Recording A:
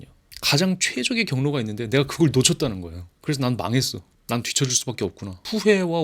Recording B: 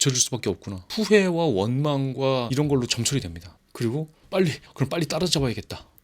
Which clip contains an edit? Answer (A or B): B